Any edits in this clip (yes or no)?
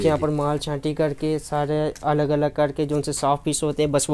no